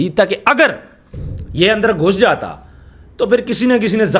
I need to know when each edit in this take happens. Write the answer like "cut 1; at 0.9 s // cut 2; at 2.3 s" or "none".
none